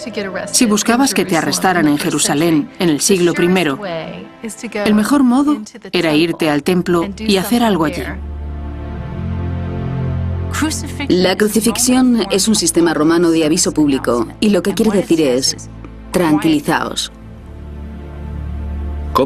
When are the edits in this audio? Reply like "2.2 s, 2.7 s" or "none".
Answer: 12.7 s

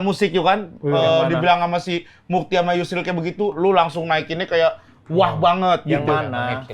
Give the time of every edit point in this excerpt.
none

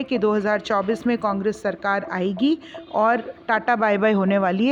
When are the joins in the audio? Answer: none

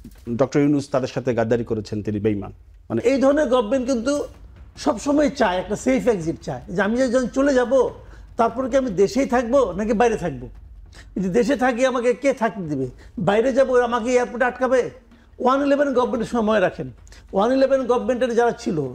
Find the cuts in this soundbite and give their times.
3.0 s

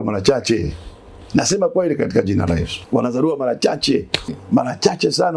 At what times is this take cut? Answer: 2.7 s, 4.4 s

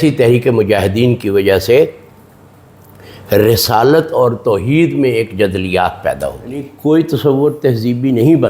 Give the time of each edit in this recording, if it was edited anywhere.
6.7 s

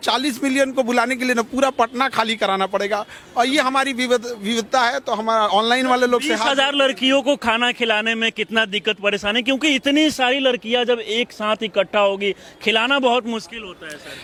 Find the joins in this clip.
none

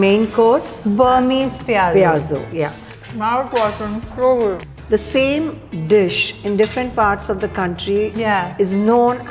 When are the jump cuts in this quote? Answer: 2.9 s, 4.6 s

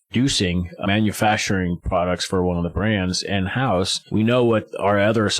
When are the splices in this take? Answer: 4.0 s

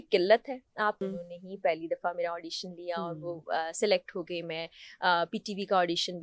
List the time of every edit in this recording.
1.0 s

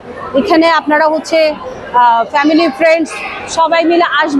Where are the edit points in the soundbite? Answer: none

